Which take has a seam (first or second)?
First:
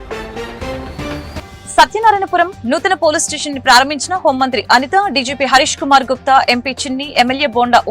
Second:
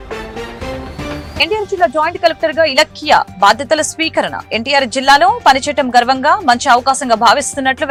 first